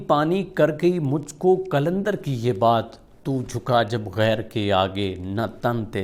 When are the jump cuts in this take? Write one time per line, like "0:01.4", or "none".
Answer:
none